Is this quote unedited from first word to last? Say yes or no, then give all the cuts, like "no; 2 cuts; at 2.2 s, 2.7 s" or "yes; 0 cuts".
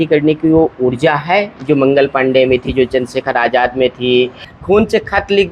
no; 1 cut; at 4.5 s